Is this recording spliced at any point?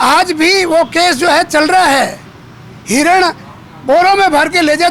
no; 0 cuts

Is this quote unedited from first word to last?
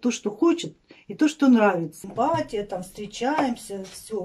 no; 1 cut; at 2.0 s

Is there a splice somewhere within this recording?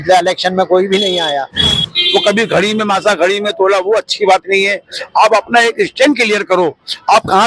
yes; 1 cut; at 1.8 s

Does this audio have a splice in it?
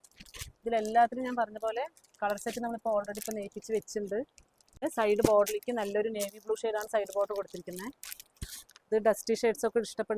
yes; 1 cut; at 4.8 s

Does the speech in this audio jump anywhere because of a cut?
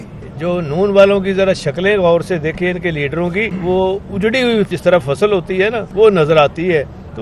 yes; 3 cuts; at 3.5 s, 4.7 s, 5.8 s

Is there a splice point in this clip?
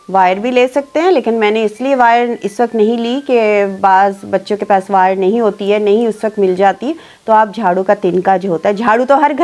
no; 0 cuts

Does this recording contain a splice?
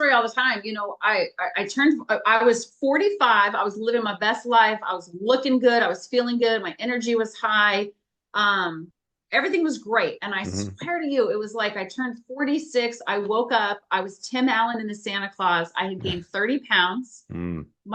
no; 0 cuts

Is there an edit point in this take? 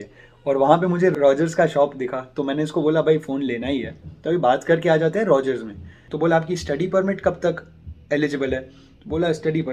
yes; 2 cuts; at 1.1 s, 6.0 s

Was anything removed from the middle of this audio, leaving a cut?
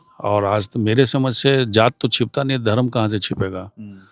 no; 0 cuts

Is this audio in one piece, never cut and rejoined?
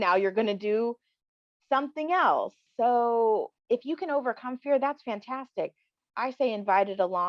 no; 2 cuts; at 2.6 s, 3.6 s

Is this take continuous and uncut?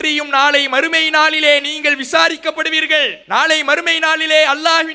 no; 1 cut; at 3.2 s

